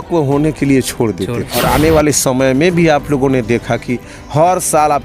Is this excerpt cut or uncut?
cut